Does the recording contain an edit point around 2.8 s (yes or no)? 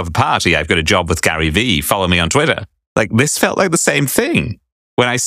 no